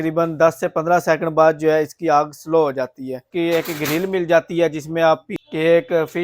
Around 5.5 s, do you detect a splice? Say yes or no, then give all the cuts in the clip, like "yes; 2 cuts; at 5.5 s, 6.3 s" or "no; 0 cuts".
yes; 2 cuts; at 3.7 s, 5.5 s